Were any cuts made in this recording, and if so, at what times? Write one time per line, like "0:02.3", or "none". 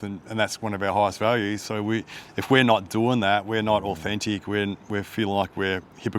none